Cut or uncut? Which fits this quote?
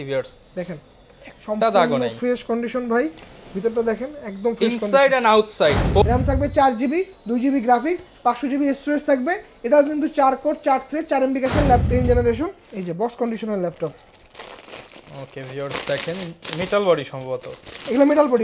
cut